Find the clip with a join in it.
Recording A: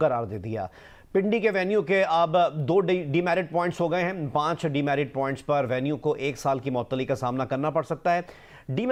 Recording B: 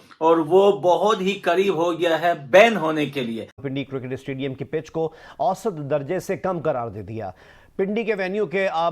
B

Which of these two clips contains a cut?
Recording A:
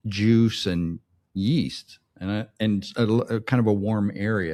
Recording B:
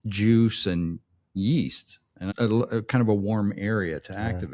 B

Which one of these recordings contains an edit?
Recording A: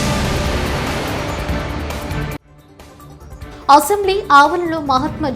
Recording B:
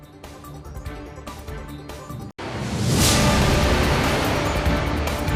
A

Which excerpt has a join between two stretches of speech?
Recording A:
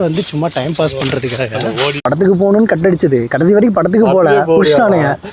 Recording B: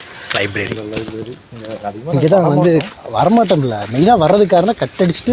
A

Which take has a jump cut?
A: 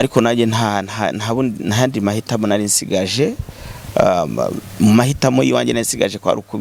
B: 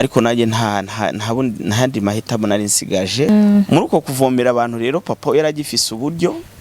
B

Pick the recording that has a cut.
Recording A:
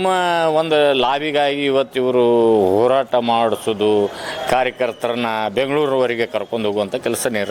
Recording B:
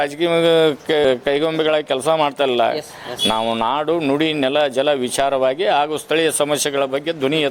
B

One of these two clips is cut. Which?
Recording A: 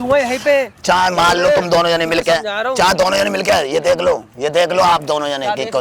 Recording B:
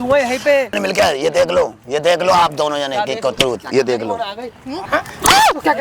B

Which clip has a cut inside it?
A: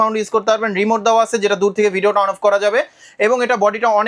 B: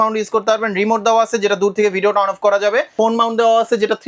B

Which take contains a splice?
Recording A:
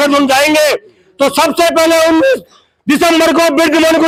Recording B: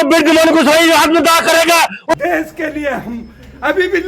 B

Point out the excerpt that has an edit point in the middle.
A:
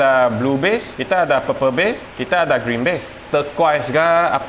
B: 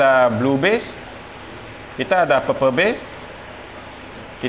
A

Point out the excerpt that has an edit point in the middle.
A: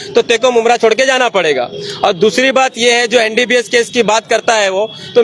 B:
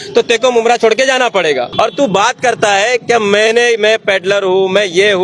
B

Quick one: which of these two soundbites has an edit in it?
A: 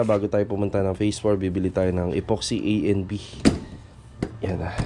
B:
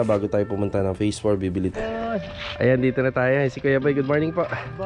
B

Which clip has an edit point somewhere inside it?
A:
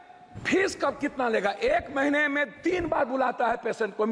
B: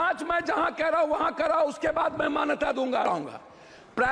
B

